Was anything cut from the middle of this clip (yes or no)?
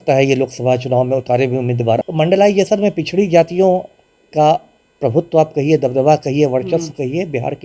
yes